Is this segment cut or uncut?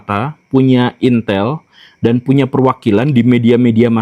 uncut